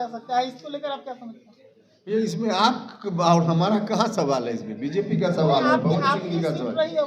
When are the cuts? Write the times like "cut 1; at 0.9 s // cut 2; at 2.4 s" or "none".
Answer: none